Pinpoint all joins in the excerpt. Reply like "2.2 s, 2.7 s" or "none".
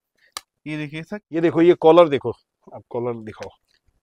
1.2 s